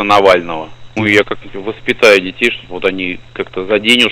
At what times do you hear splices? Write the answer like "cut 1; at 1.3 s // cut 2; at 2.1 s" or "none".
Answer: cut 1; at 0.9 s